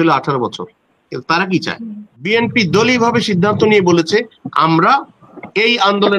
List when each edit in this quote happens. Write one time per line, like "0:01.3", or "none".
0:02.1